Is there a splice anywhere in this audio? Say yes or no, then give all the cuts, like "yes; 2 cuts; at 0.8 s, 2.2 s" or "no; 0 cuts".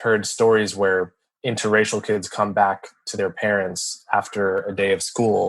yes; 1 cut; at 1.3 s